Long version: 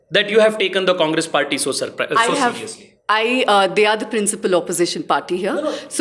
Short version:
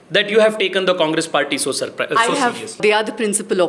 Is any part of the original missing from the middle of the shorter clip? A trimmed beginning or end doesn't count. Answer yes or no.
yes